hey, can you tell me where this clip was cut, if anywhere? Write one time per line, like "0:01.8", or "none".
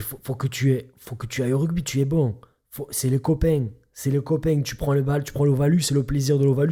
none

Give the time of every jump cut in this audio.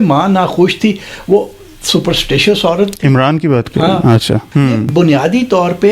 0:04.5

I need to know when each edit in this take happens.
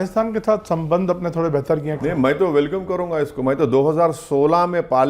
0:01.9

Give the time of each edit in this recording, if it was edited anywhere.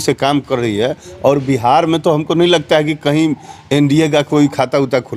none

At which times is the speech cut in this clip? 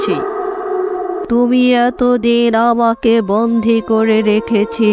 0:01.2

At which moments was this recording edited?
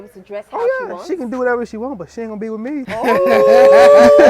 0:02.9

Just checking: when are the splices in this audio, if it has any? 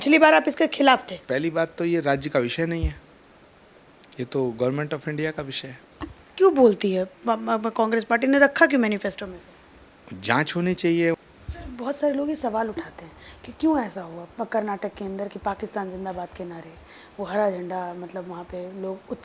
0:01.2
0:11.2

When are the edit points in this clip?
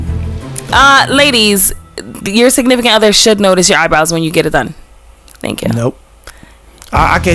none

